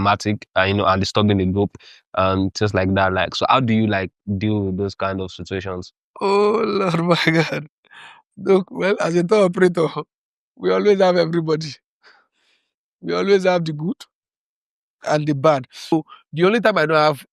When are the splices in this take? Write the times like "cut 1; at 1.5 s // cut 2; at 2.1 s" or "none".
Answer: cut 1; at 15.9 s